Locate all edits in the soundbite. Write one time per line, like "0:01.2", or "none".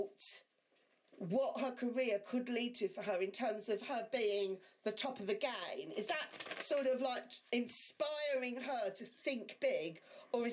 none